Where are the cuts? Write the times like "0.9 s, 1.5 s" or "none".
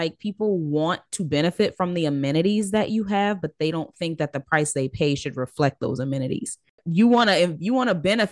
6.8 s